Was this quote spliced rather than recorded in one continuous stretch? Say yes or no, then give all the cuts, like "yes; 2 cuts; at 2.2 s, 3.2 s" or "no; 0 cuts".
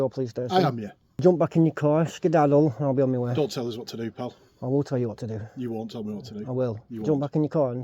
yes; 1 cut; at 1.2 s